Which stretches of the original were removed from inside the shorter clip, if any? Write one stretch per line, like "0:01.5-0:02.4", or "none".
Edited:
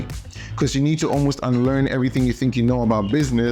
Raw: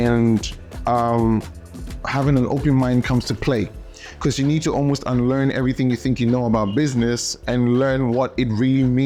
none